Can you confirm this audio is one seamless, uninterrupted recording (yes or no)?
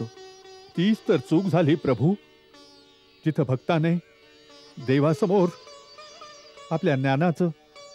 yes